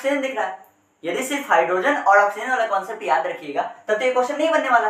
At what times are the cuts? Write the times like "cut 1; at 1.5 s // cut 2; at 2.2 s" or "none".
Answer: none